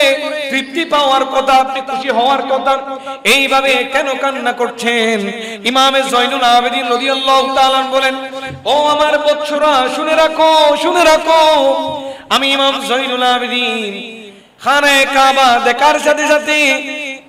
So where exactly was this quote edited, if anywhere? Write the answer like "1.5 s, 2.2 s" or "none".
none